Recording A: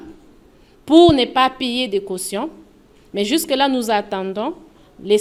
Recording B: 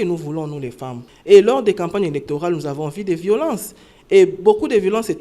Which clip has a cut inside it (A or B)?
B